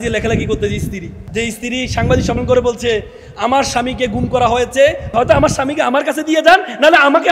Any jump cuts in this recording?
yes; 2 cuts; at 1.2 s, 5.1 s

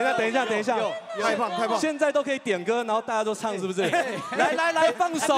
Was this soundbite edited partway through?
no; 0 cuts

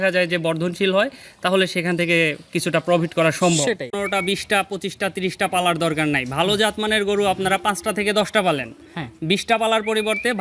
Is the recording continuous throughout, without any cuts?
no; 1 cut; at 3.9 s

